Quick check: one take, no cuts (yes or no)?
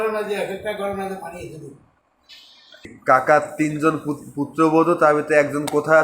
no